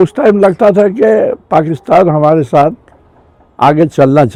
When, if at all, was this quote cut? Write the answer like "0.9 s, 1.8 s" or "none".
none